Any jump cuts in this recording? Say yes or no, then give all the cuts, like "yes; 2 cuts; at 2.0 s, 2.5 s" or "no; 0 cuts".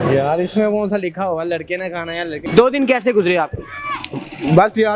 yes; 1 cut; at 2.4 s